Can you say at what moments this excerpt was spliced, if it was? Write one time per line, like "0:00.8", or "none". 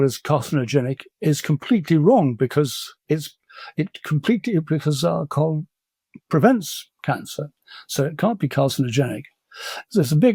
none